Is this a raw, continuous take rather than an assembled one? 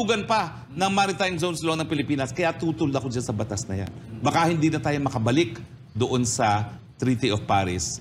yes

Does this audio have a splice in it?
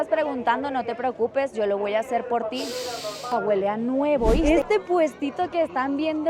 yes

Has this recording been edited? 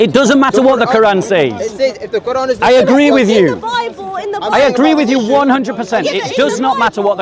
no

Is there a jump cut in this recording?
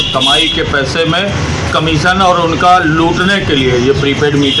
no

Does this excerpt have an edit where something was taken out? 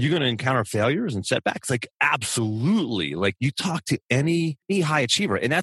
yes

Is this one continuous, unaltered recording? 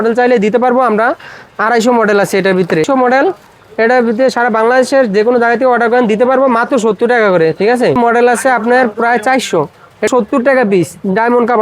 no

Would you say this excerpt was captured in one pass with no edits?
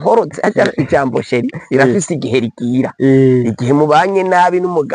yes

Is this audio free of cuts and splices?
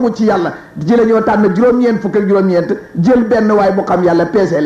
yes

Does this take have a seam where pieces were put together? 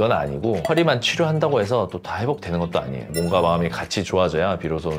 yes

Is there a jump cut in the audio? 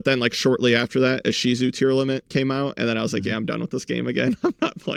no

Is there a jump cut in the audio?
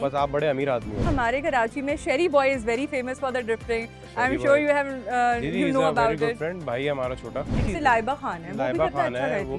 yes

